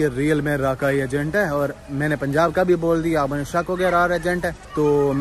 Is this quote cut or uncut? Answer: uncut